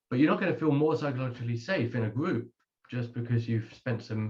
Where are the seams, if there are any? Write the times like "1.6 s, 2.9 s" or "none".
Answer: none